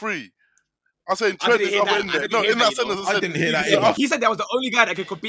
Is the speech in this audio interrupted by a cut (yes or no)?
yes